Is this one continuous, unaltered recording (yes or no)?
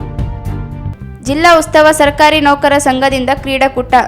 yes